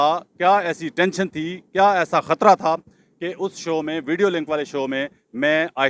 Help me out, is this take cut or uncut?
uncut